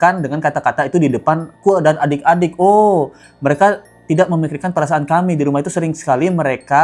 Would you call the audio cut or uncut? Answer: uncut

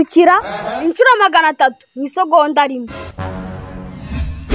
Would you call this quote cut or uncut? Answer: cut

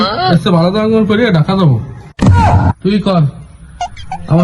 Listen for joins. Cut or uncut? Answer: cut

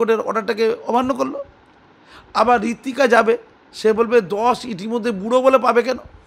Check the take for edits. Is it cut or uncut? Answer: uncut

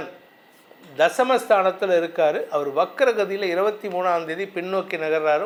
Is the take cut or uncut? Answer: uncut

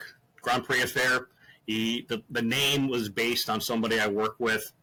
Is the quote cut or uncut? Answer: uncut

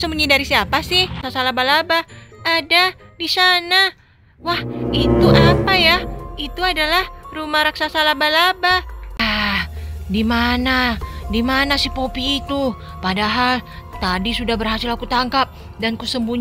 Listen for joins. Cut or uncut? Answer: cut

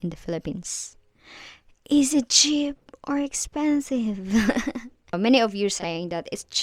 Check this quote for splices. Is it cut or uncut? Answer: cut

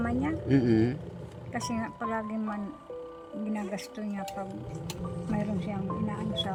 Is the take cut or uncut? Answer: uncut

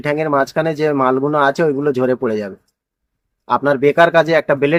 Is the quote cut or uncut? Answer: uncut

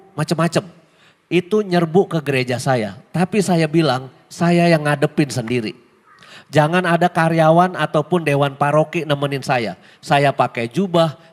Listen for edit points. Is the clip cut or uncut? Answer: uncut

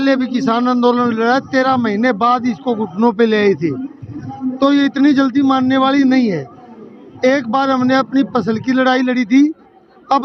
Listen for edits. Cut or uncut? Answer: uncut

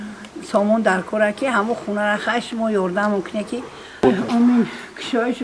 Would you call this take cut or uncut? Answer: cut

